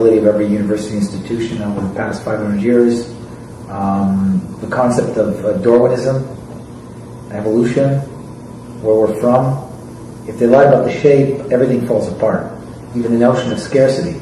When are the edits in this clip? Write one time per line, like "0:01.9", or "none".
0:04.8